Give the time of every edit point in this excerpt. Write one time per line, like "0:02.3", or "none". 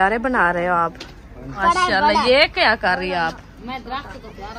0:01.6